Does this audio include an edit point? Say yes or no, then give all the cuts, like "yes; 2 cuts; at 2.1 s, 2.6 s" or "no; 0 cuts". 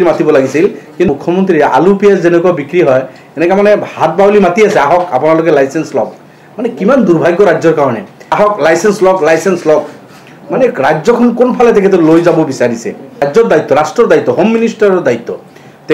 yes; 3 cuts; at 1.1 s, 8.2 s, 13.2 s